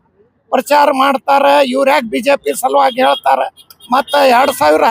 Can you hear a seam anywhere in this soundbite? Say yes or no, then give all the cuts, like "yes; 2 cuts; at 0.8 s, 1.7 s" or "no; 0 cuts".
no; 0 cuts